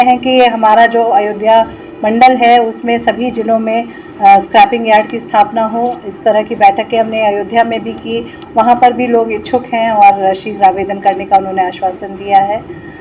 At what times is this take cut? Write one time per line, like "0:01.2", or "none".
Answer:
none